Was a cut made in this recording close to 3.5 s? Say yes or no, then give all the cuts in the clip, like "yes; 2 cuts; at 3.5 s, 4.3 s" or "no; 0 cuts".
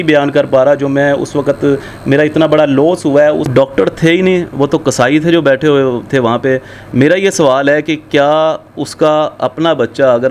yes; 1 cut; at 3.5 s